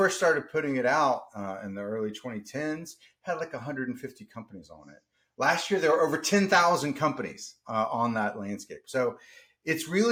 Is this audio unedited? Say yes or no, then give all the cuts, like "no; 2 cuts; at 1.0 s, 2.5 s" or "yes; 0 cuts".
yes; 0 cuts